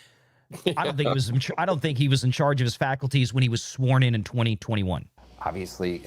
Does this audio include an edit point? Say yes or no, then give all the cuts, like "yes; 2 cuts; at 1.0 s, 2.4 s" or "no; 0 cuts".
yes; 1 cut; at 5.1 s